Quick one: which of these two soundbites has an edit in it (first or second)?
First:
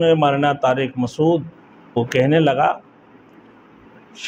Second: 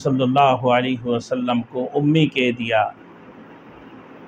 first